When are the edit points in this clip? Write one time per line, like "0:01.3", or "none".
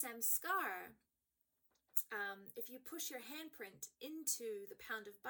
none